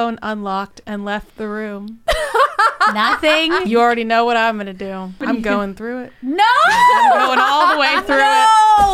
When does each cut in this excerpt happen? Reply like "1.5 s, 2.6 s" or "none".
3.6 s, 5.2 s